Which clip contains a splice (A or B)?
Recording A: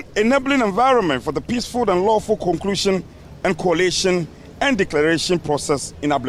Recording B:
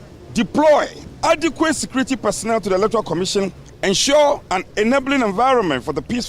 B